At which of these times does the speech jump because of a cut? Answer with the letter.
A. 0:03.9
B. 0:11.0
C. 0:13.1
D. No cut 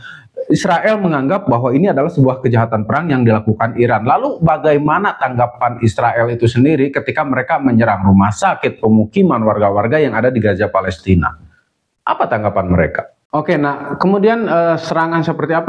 C